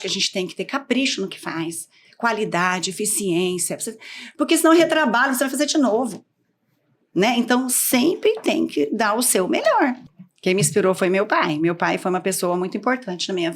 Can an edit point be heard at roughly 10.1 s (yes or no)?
yes